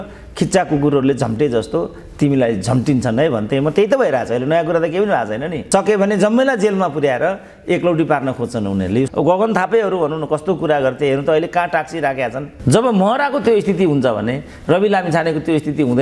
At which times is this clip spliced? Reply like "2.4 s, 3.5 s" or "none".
5.5 s, 9.1 s, 12.5 s